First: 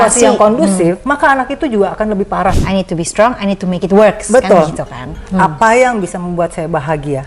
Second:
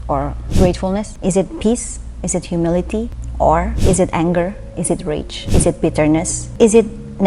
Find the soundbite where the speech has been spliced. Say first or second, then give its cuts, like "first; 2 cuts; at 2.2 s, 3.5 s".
first; 2 cuts; at 1.0 s, 2.6 s